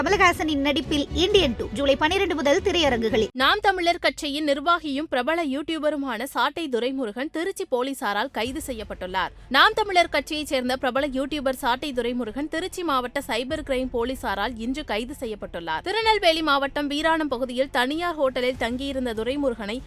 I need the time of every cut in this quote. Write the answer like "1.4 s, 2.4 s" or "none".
3.3 s